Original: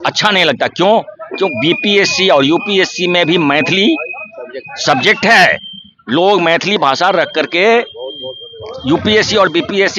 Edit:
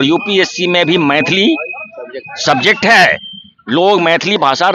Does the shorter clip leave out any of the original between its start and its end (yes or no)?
no